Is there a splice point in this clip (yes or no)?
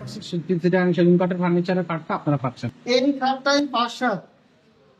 yes